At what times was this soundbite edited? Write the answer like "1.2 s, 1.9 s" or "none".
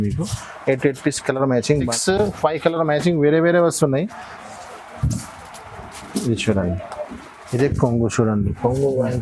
1.9 s